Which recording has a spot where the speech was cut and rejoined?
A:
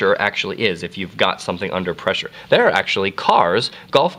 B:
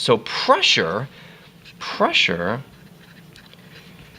B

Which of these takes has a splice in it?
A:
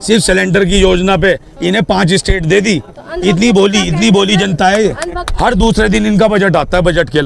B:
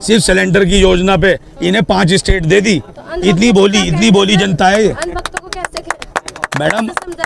A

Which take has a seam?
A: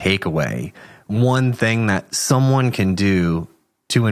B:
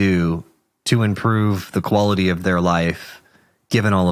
A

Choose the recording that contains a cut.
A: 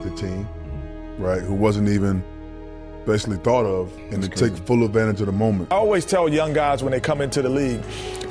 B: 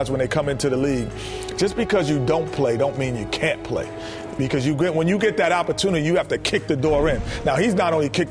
A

